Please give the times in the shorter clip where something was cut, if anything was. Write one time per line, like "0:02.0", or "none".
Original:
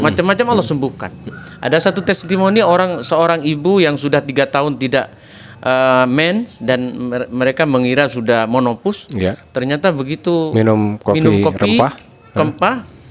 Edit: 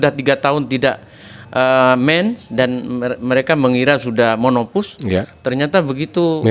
none